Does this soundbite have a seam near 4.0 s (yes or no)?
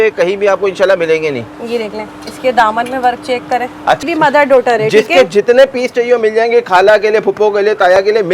yes